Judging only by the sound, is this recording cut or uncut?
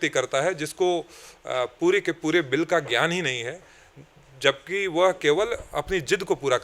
uncut